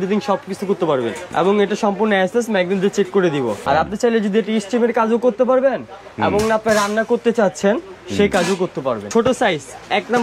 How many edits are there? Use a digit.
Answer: 3